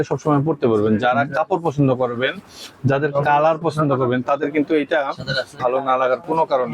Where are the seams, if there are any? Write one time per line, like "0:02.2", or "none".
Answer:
0:05.6

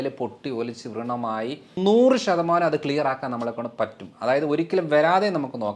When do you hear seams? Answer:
0:01.8

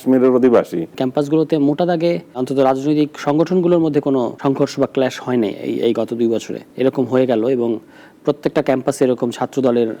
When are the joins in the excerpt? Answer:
0:01.0
0:02.4
0:04.3
0:06.6

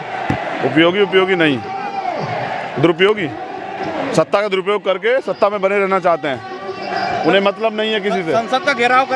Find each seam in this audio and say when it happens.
none

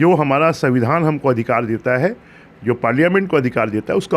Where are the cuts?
none

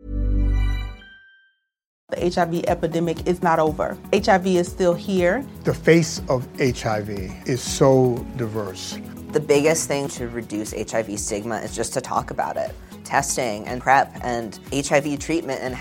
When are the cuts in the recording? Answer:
0:02.0

